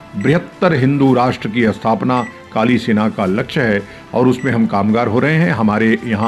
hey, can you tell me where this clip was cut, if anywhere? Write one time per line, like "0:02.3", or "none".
none